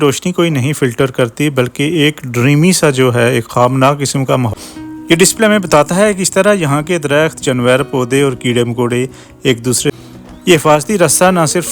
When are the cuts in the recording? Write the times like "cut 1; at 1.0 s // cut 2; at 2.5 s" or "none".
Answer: cut 1; at 4.5 s // cut 2; at 9.9 s